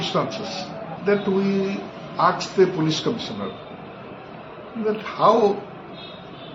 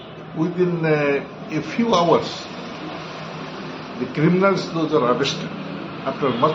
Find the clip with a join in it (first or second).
first